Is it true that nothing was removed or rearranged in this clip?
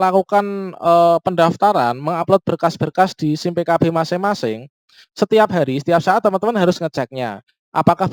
yes; 0 cuts

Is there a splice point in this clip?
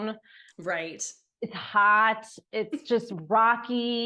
no; 0 cuts

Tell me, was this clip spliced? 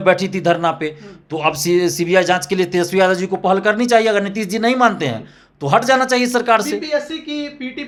no; 0 cuts

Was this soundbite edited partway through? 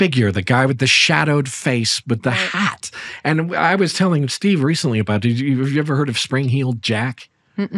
no; 0 cuts

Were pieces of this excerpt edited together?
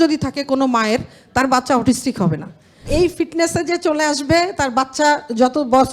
yes; 1 cut; at 2.9 s

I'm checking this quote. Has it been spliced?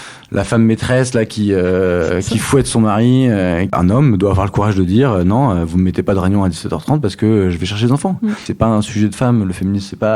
yes; 2 cuts; at 3.7 s, 8.5 s

